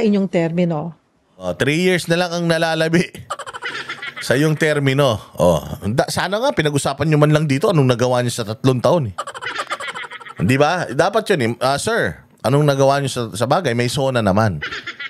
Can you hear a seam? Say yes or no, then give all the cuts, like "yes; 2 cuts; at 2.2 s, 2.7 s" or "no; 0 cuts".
no; 0 cuts